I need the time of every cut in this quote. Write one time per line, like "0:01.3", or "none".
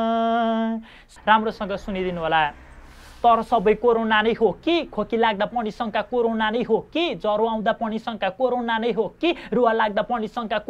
0:01.1